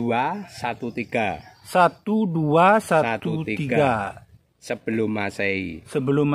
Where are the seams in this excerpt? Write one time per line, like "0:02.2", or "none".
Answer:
none

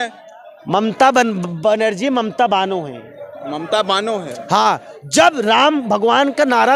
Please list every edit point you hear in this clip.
none

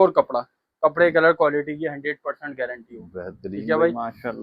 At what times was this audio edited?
none

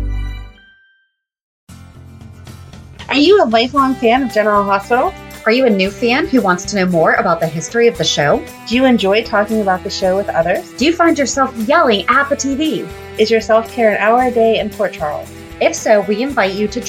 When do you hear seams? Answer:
0:01.5

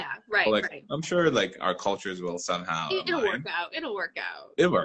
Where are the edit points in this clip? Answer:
none

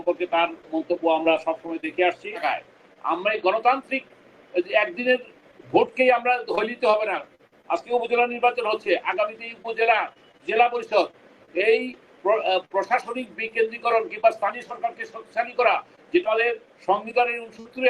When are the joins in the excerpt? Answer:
0:02.4

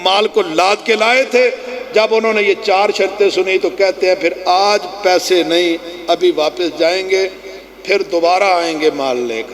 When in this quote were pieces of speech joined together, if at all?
none

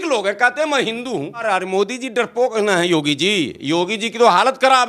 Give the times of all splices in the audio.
0:01.4

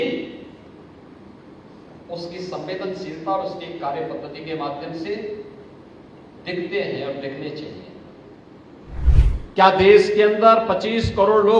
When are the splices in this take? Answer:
0:09.1

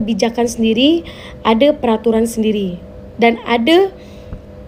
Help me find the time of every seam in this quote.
none

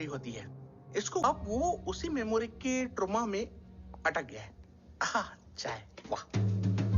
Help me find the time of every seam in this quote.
0:01.2

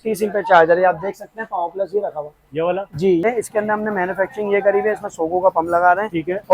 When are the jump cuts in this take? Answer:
0:03.2

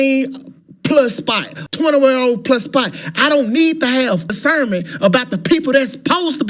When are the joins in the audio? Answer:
0:01.5

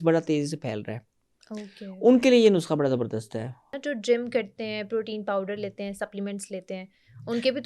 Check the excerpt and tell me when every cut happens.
0:03.7

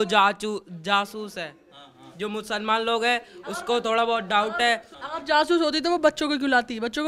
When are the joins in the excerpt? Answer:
0:04.9

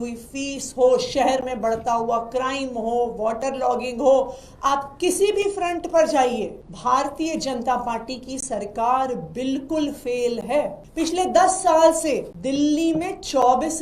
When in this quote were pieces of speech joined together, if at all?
0:06.6
0:10.8
0:12.3

